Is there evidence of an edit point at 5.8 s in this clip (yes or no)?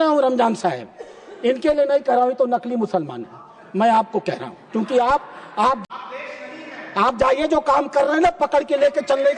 yes